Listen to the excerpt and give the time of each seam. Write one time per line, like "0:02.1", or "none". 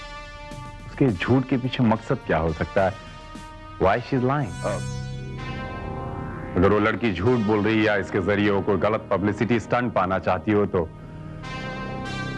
0:04.6